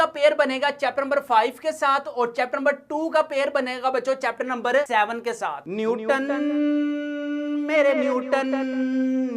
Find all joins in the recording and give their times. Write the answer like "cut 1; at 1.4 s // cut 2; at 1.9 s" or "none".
cut 1; at 5.6 s